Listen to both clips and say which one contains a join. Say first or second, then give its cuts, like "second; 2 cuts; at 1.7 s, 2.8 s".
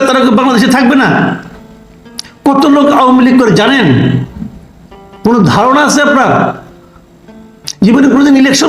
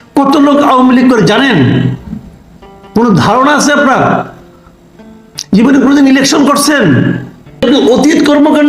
second; 1 cut; at 7.6 s